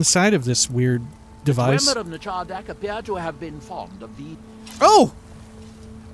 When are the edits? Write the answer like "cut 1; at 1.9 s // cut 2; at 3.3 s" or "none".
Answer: cut 1; at 4.6 s